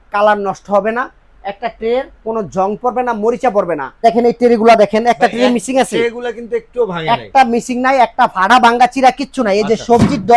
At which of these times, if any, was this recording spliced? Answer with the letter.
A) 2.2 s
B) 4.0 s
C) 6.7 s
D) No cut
B